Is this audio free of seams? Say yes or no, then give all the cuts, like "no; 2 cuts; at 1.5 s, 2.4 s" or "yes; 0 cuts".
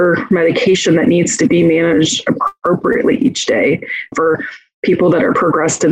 no; 1 cut; at 4.1 s